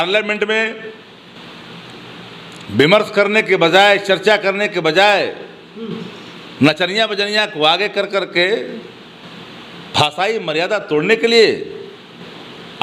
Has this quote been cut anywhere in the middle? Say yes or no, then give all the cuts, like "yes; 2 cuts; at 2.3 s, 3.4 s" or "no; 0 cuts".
no; 0 cuts